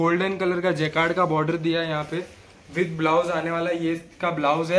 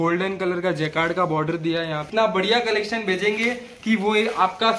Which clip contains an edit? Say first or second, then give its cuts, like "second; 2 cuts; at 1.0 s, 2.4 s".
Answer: second; 1 cut; at 2.0 s